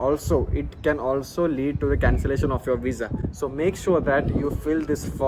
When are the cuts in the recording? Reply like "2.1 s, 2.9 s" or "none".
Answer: none